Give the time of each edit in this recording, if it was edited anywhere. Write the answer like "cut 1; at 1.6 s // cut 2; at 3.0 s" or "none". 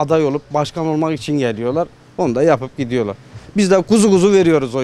none